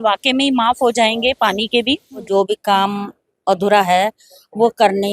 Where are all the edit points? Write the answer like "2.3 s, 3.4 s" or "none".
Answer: 2.3 s